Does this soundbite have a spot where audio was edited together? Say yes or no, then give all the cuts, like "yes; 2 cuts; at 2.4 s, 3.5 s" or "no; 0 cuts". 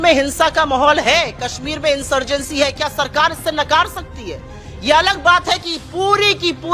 no; 0 cuts